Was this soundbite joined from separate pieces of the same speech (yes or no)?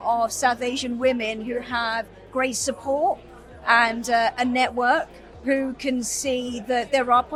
no